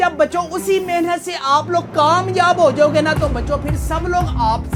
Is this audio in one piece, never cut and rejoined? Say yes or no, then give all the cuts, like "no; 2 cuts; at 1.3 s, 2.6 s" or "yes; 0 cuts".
yes; 0 cuts